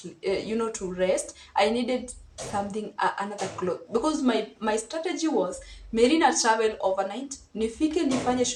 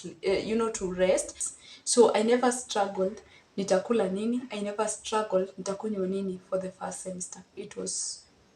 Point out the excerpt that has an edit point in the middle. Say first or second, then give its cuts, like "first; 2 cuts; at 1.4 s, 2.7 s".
second; 1 cut; at 1.4 s